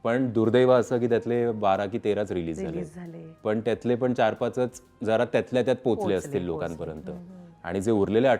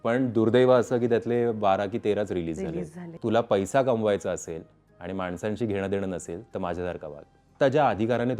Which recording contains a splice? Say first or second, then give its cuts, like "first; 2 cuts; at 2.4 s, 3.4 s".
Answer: second; 2 cuts; at 3.1 s, 7.5 s